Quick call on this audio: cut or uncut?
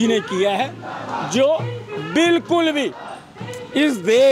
uncut